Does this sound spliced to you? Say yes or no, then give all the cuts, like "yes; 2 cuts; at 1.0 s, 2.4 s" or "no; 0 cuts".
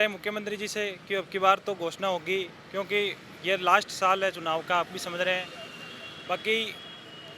no; 0 cuts